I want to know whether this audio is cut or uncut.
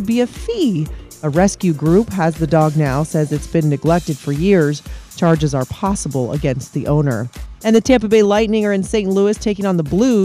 uncut